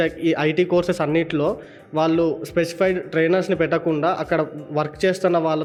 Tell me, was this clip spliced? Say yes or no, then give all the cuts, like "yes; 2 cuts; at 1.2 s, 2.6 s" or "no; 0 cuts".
no; 0 cuts